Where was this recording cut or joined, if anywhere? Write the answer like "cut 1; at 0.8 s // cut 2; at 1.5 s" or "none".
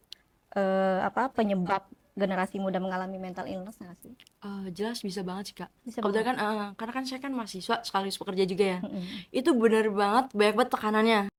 none